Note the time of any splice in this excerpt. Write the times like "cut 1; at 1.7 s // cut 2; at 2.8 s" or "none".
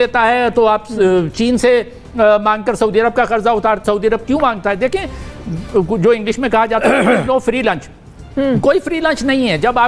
none